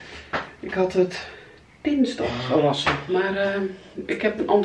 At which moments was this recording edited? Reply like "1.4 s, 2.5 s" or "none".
none